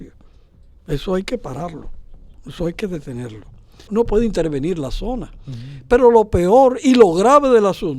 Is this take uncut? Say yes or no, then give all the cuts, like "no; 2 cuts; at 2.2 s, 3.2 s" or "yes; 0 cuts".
no; 1 cut; at 3.9 s